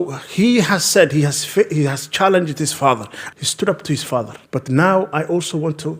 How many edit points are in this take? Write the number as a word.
two